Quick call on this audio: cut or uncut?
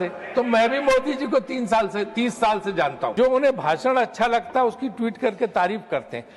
cut